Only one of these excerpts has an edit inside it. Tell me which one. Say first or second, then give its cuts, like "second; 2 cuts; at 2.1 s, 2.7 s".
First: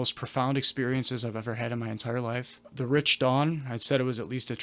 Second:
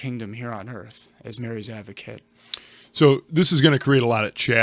first; 1 cut; at 2.7 s